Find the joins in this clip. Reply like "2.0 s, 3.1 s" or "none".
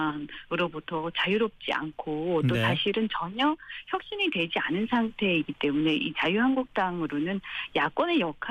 2.5 s